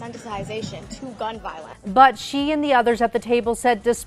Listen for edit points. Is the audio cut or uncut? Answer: cut